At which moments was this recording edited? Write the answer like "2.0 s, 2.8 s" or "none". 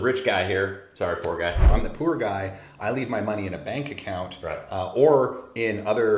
1.7 s